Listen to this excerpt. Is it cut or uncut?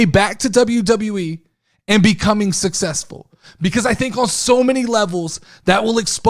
uncut